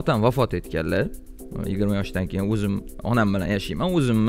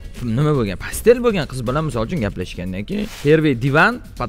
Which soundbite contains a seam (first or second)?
second